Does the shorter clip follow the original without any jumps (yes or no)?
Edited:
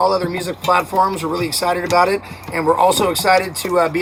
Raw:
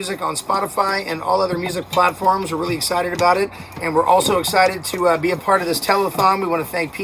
yes